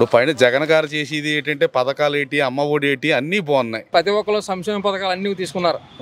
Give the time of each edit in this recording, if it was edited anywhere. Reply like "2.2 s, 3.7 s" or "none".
3.9 s